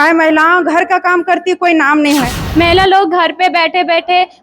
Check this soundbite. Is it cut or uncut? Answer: cut